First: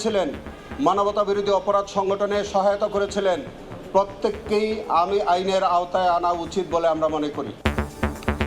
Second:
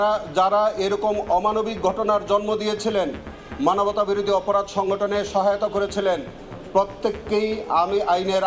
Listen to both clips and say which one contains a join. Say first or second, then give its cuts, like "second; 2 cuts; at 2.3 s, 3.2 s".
first; 1 cut; at 7.6 s